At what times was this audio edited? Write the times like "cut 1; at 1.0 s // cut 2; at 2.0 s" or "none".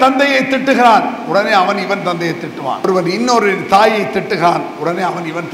cut 1; at 2.9 s